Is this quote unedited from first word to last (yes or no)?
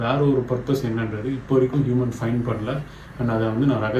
yes